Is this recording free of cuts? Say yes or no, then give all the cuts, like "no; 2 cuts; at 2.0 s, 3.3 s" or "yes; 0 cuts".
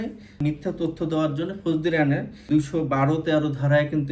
no; 1 cut; at 2.4 s